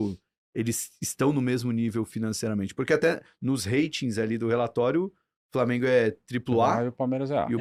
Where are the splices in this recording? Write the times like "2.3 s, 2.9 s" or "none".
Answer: none